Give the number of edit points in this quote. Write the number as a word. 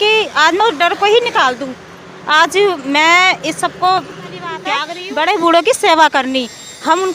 one